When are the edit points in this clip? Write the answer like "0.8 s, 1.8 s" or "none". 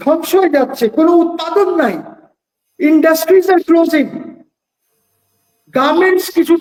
none